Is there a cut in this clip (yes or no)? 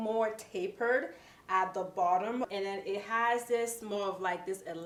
no